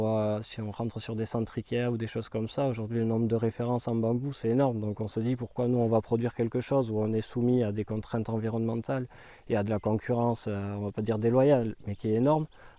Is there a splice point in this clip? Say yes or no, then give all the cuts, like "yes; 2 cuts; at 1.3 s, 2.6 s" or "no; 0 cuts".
no; 0 cuts